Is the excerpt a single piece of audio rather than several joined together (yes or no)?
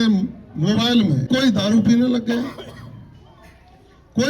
no